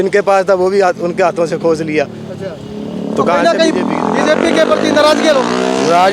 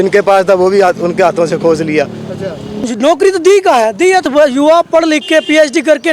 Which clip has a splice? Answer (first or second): second